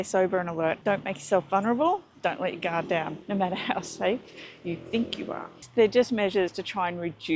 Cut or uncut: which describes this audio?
cut